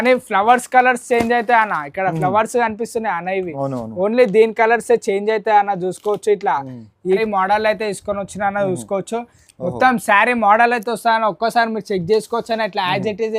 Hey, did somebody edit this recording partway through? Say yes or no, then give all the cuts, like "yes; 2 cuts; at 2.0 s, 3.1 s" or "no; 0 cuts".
yes; 1 cut; at 7.2 s